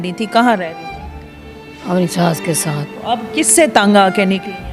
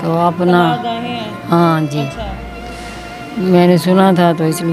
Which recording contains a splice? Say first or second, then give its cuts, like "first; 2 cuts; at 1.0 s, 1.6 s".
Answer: first; 1 cut; at 2.9 s